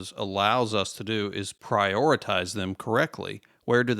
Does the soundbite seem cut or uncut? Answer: cut